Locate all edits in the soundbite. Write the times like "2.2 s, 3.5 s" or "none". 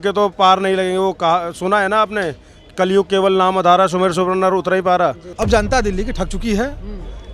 5.2 s